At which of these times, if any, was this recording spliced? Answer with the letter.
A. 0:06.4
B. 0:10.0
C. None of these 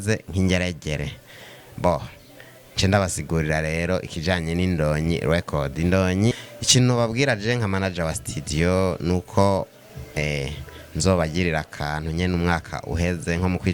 A